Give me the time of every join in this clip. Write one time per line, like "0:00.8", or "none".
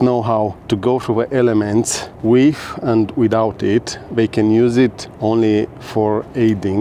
none